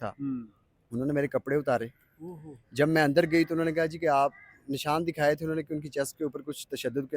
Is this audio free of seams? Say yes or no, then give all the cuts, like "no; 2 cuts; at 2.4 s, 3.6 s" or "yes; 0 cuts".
yes; 0 cuts